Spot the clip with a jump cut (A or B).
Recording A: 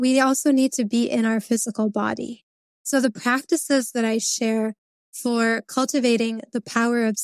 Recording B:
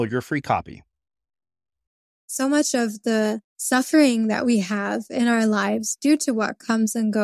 B